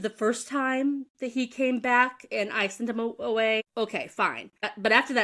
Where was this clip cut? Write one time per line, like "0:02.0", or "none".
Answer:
0:04.3